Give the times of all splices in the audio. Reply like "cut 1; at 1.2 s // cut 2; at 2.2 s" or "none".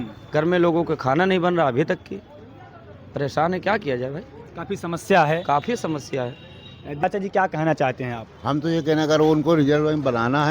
cut 1; at 6.9 s